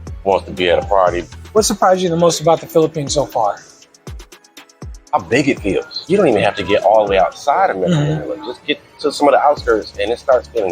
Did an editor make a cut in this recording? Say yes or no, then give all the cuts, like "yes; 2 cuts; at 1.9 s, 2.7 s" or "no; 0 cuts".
yes; 2 cuts; at 1.2 s, 6.0 s